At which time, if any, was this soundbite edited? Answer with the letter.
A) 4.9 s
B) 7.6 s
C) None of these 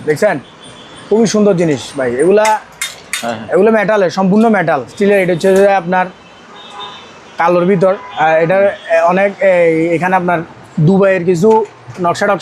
A